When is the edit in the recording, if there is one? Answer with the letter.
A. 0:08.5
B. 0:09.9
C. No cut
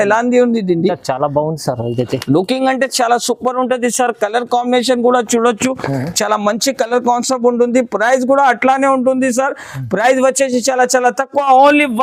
C